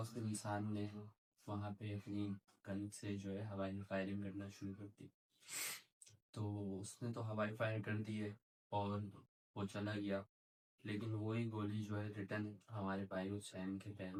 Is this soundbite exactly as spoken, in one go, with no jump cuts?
yes; 0 cuts

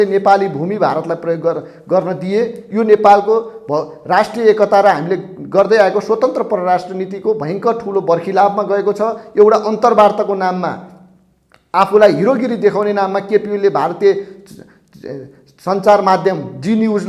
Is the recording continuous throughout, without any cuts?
yes; 0 cuts

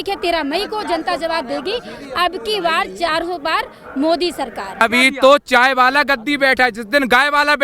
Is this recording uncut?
no; 1 cut; at 4.8 s

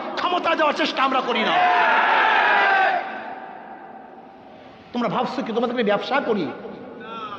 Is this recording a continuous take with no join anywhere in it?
yes; 0 cuts

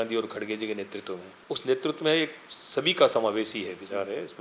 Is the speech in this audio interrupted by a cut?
yes; 1 cut; at 1.3 s

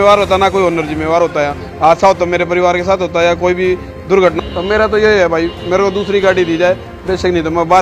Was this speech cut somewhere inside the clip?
yes; 1 cut; at 4.4 s

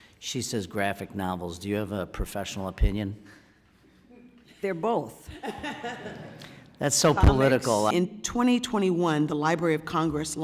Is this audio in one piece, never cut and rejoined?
no; 1 cut; at 7.9 s

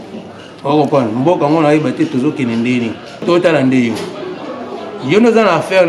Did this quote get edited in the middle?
yes; 1 cut; at 3.2 s

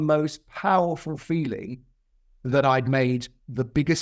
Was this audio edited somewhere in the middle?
no; 0 cuts

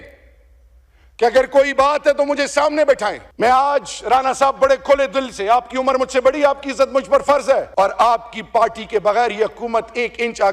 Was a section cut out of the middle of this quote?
yes; 2 cuts; at 3.2 s, 7.7 s

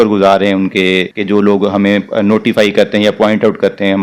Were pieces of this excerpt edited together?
yes; 1 cut; at 1.1 s

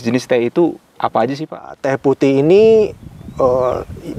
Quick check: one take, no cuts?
no; 1 cut; at 1.8 s

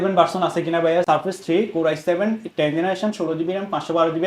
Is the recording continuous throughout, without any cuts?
no; 1 cut; at 1.1 s

